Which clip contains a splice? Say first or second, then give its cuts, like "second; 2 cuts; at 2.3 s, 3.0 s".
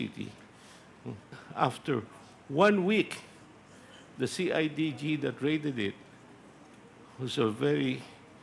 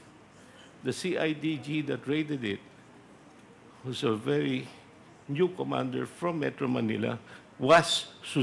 first; 1 cut; at 1.4 s